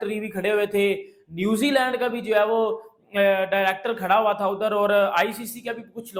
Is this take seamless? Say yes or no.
yes